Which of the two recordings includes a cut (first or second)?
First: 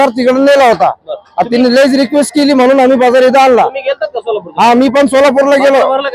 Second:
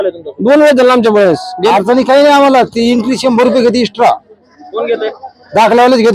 second